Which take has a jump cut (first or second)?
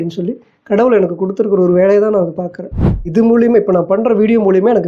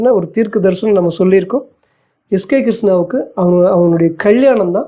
first